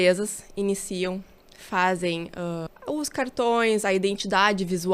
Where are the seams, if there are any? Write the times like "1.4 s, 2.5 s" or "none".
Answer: 2.7 s